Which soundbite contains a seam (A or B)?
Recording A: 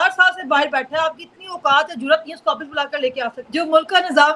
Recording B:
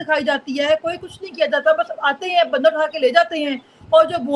A